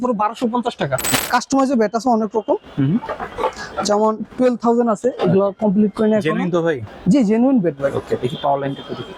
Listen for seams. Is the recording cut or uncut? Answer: cut